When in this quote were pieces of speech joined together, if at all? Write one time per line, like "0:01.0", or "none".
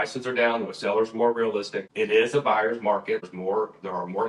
0:01.8
0:03.3